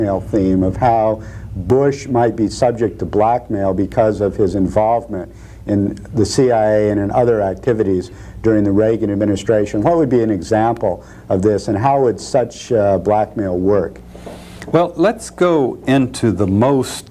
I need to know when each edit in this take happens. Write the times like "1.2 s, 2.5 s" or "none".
none